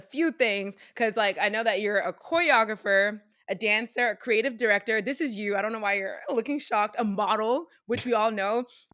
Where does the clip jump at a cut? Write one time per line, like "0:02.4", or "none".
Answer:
none